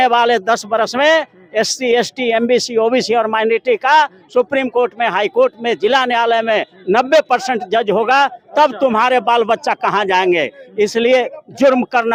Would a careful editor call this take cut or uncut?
uncut